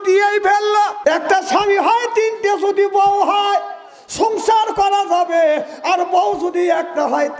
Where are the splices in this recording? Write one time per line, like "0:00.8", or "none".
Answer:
0:01.0